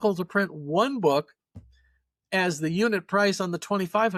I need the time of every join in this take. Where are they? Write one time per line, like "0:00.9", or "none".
none